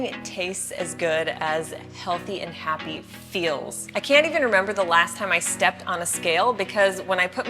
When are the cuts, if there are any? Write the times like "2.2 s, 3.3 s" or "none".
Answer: 3.8 s